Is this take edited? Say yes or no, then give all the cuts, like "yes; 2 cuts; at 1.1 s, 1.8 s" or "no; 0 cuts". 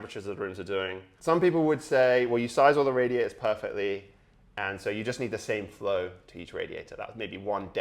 yes; 1 cut; at 1.1 s